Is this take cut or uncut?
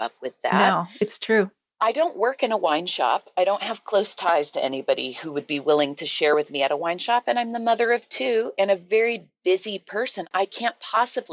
uncut